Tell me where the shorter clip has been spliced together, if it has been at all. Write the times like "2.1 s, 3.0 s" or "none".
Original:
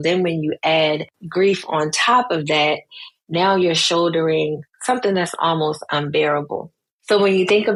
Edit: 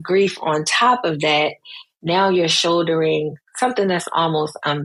none